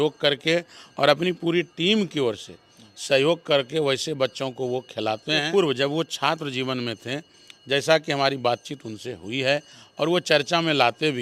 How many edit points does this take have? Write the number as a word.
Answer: one